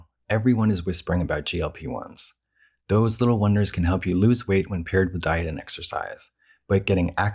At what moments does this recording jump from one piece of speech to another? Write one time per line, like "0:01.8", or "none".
none